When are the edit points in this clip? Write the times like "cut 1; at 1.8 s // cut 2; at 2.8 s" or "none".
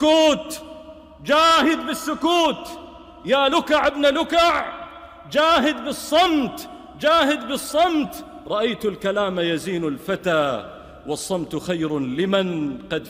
none